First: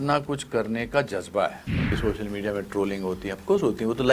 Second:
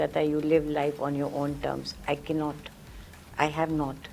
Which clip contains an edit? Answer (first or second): first